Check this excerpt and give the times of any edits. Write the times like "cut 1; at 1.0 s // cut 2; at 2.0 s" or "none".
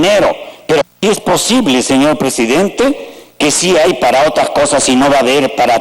cut 1; at 1.0 s

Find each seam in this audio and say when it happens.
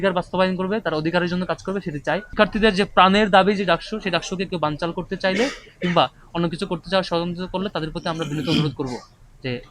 cut 1; at 2.3 s

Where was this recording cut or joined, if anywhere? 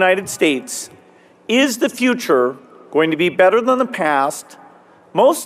none

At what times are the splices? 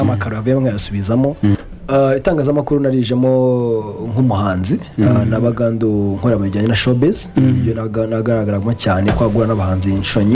cut 1; at 1.7 s

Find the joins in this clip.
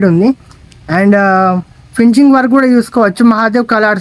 none

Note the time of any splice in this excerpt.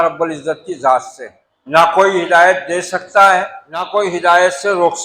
cut 1; at 1.1 s // cut 2; at 3.3 s

